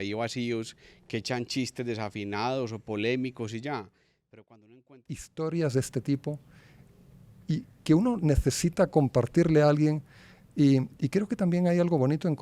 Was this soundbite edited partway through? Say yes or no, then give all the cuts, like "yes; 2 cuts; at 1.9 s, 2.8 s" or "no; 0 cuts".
yes; 1 cut; at 5.0 s